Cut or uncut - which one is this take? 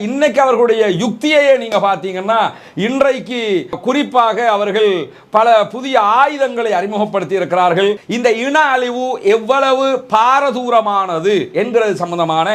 cut